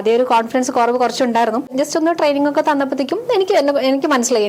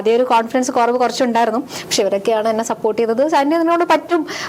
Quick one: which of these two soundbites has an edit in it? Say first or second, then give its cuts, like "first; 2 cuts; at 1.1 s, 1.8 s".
first; 1 cut; at 1.7 s